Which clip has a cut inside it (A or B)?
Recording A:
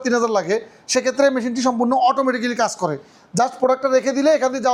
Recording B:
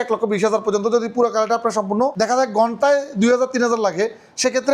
B